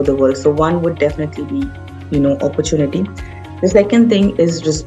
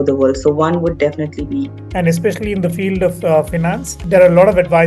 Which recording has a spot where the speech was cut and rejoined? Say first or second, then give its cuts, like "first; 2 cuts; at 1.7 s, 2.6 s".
second; 2 cuts; at 1.8 s, 4.0 s